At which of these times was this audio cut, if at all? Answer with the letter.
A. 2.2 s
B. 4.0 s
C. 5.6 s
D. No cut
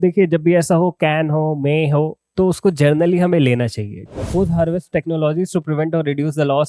B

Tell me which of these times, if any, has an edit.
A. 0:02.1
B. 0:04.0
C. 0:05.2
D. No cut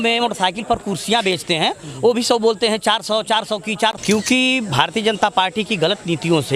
B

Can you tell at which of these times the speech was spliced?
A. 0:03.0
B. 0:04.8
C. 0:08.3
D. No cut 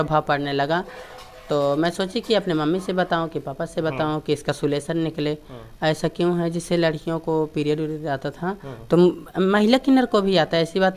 D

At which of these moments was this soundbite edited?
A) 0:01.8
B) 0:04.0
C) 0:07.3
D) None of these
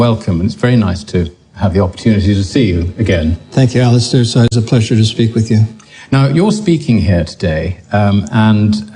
C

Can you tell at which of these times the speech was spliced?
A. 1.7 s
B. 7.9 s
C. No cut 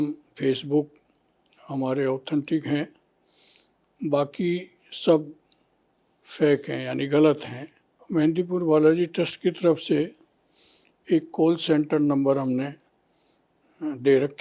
B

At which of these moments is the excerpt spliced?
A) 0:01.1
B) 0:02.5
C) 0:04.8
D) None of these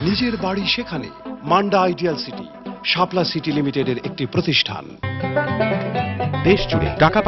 C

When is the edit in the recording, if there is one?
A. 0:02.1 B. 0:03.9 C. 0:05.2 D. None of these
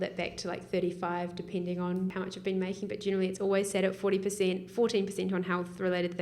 A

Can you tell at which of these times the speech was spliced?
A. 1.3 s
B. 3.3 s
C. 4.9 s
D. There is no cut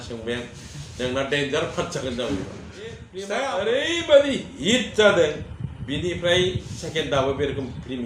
B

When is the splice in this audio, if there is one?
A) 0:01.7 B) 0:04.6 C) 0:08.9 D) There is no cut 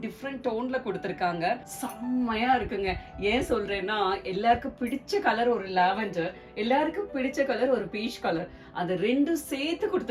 A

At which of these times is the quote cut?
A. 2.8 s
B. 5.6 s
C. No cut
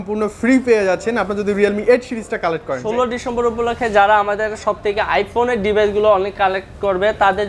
A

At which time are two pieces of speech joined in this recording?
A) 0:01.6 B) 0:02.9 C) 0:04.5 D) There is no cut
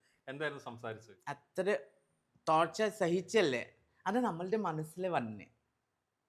A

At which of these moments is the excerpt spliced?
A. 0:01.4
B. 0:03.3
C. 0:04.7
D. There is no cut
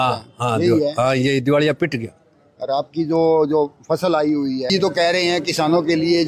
C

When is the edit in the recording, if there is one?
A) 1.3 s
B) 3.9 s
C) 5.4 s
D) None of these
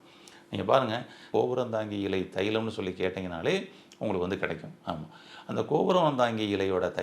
A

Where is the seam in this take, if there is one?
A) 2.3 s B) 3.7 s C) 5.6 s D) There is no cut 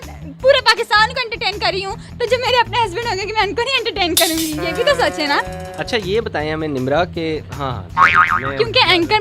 C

